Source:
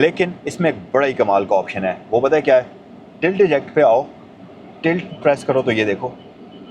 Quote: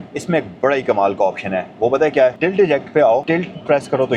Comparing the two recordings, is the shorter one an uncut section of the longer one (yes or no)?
no